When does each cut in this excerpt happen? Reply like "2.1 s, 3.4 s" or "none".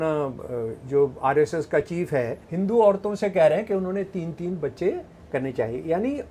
2.4 s